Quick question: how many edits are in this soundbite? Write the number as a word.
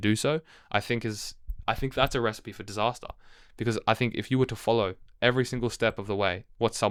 zero